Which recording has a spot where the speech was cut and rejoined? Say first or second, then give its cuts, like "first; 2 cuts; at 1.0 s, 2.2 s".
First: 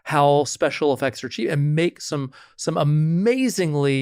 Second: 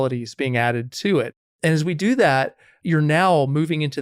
second; 2 cuts; at 1.4 s, 2.7 s